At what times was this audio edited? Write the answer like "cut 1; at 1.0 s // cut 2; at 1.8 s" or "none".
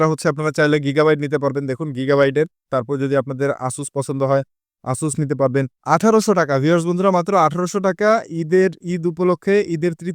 cut 1; at 2.7 s // cut 2; at 5.8 s